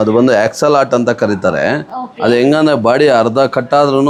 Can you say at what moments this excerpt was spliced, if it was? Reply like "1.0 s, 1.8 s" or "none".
none